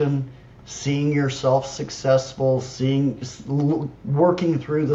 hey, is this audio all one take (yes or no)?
yes